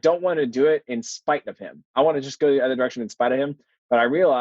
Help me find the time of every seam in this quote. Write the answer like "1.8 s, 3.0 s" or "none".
1.9 s